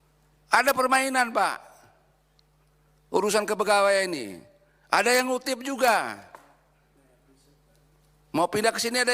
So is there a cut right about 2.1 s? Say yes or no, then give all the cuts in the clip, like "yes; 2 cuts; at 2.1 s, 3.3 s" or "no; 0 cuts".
no; 0 cuts